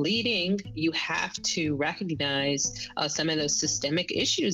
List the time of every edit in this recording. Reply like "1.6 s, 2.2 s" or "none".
none